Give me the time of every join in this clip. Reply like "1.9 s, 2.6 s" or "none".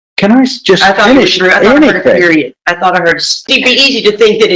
3.5 s